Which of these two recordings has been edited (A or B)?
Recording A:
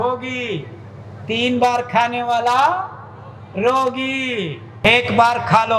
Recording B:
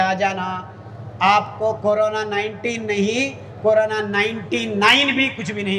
A